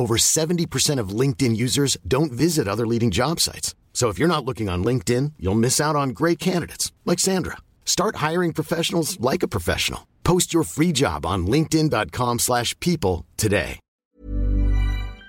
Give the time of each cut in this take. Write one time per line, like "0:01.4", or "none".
0:14.0